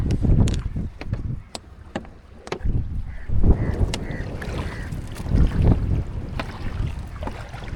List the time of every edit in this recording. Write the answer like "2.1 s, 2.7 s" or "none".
none